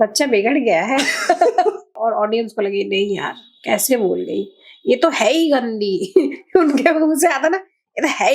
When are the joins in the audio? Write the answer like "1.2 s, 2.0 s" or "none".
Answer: 1.9 s